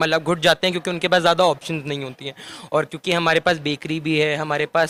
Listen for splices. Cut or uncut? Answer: uncut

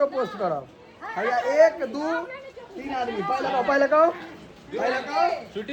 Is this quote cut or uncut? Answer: uncut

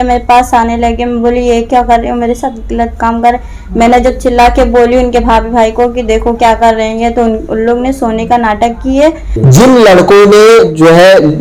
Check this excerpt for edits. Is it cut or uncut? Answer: cut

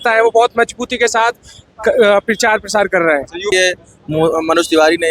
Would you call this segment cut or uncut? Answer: cut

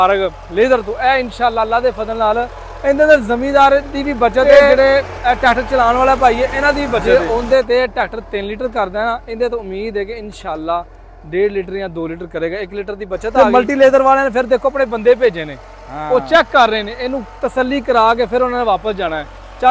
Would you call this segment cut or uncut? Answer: cut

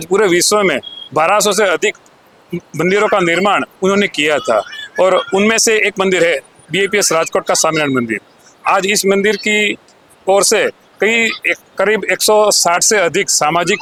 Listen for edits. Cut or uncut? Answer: uncut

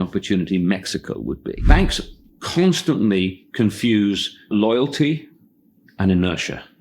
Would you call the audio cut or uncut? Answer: cut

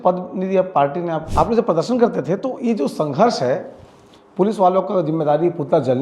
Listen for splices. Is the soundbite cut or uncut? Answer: cut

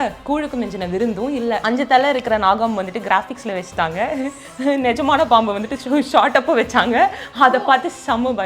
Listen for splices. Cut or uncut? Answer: cut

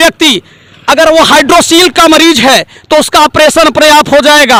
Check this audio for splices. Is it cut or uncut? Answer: uncut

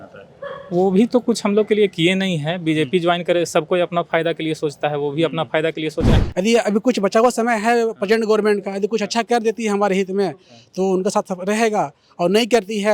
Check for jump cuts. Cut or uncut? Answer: cut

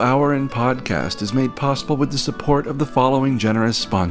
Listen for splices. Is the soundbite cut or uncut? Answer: uncut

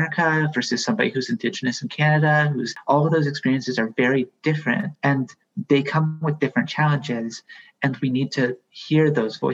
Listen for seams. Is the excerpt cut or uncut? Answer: cut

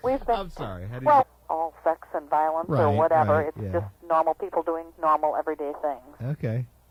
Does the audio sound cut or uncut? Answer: uncut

